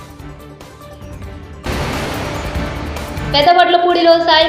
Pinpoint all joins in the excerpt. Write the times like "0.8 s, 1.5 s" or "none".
1.6 s, 3.3 s